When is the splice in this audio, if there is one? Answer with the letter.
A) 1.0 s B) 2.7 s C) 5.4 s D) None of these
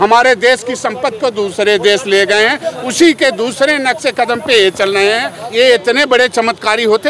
C